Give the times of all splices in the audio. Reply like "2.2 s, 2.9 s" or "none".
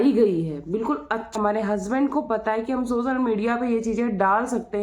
1.3 s